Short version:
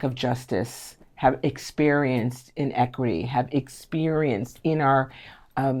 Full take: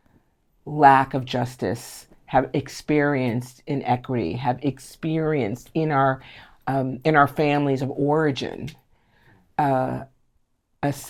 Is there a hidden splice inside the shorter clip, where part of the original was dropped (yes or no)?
no